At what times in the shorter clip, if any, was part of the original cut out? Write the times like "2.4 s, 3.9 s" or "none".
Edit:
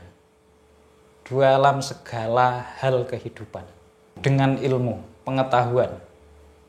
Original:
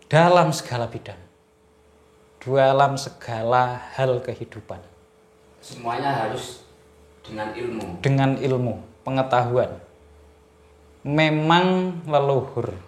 4.1 s